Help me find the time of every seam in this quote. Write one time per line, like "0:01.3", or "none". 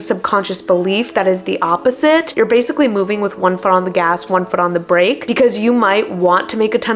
none

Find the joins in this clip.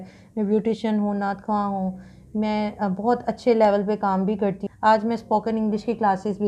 0:04.6

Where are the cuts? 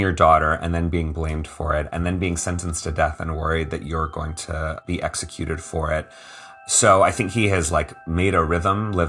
0:04.8
0:06.5

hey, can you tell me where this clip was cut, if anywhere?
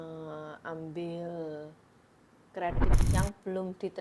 0:02.9

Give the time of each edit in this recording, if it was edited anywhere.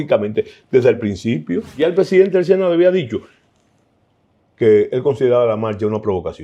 0:01.8

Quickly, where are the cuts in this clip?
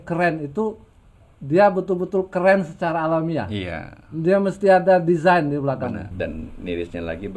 0:06.1

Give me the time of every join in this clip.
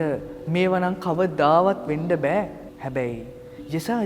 0:02.7

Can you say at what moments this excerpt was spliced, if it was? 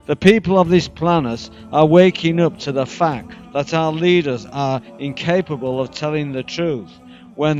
none

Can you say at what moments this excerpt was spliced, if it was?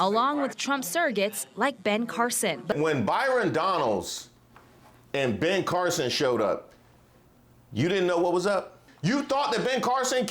0:02.7
0:08.9

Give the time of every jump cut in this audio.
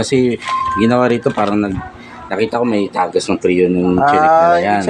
none

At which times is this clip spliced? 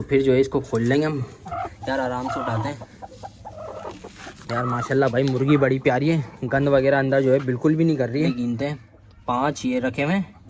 0:01.4
0:08.3

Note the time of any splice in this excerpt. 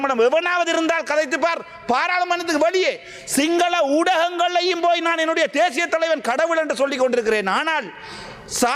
none

